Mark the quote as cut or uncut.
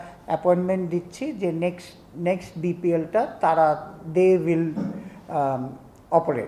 uncut